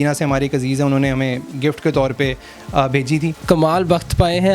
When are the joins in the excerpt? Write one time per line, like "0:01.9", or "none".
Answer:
0:03.4